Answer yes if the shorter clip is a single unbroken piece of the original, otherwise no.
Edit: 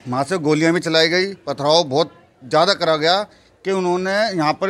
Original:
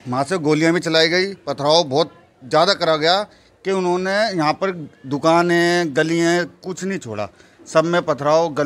yes